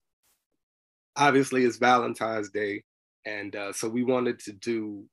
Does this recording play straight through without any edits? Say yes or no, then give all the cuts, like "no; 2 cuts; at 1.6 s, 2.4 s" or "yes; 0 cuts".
no; 1 cut; at 2.8 s